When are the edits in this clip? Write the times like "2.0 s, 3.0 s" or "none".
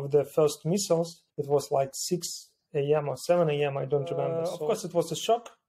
1.2 s, 4.6 s